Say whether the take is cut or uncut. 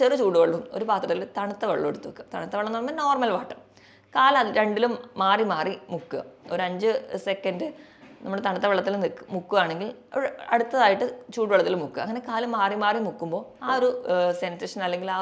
uncut